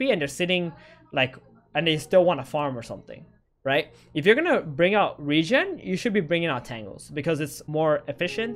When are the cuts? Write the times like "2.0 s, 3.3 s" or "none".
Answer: 7.6 s